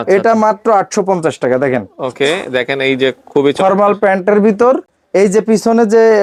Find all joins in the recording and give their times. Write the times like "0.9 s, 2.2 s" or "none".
none